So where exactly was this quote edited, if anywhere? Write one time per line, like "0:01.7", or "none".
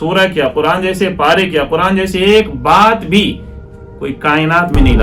none